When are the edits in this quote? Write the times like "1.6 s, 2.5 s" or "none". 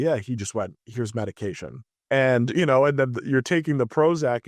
1.9 s